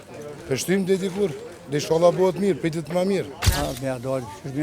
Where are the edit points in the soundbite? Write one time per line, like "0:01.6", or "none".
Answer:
0:03.4